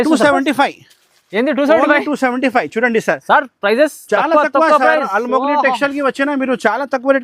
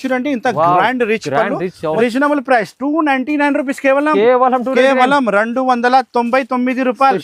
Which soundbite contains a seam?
second; 1 cut; at 2.0 s

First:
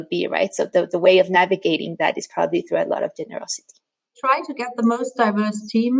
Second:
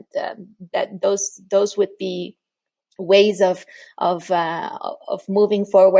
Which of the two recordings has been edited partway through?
first; 1 cut; at 3.9 s

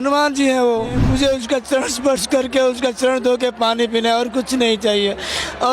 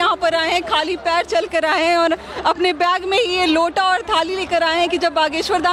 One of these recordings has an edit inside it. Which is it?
first; 1 cut; at 1.0 s

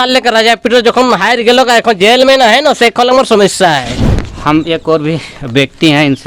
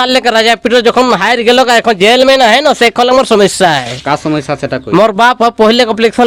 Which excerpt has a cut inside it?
first; 1 cut; at 3.9 s

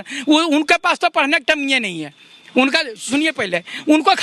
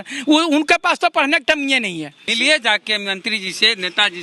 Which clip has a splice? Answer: second; 1 cut; at 2.3 s

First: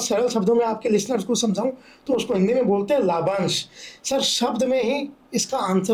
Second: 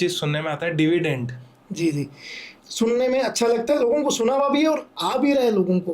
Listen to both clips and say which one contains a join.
second; 1 cut; at 2.5 s

